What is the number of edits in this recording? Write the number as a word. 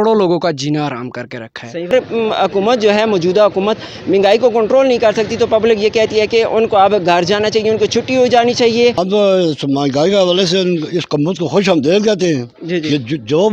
two